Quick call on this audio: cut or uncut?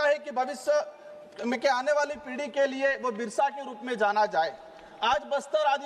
uncut